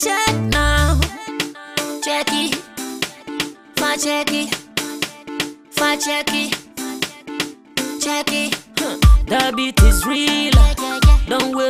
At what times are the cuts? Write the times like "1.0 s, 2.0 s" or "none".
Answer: none